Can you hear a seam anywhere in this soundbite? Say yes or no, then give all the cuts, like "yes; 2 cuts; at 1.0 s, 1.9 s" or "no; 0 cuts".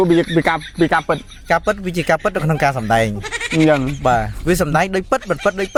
no; 0 cuts